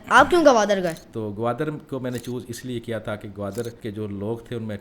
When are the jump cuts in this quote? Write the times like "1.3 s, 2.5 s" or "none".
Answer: 1.1 s, 3.8 s